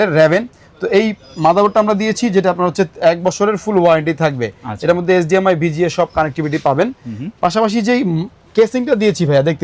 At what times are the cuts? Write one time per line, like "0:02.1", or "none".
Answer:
none